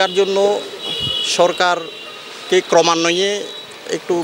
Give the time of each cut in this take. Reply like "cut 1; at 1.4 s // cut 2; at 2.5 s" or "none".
none